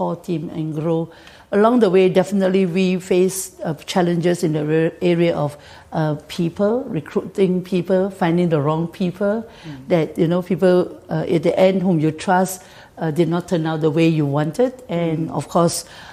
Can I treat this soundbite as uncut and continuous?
yes; 0 cuts

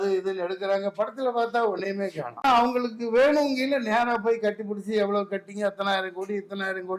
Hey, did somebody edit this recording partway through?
yes; 1 cut; at 2.4 s

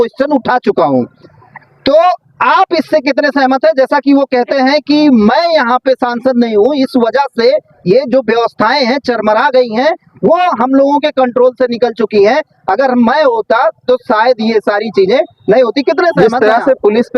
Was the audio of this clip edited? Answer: yes; 1 cut; at 16.2 s

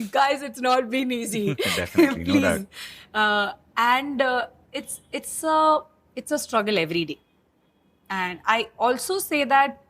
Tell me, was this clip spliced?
no; 0 cuts

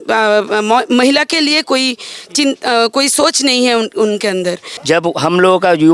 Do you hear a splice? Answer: yes; 1 cut; at 4.7 s

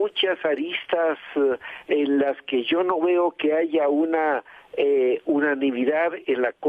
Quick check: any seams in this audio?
no; 0 cuts

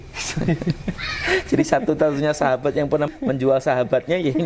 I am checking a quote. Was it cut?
yes; 1 cut; at 3.1 s

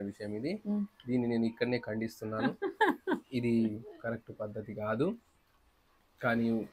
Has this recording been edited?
no; 0 cuts

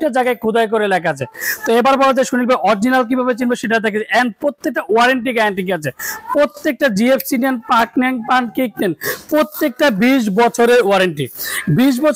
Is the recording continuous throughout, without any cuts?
yes; 0 cuts

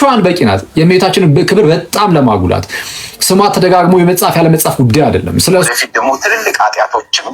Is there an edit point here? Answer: yes; 1 cut; at 5.7 s

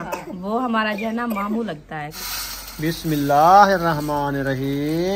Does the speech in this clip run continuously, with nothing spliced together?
no; 1 cut; at 2.1 s

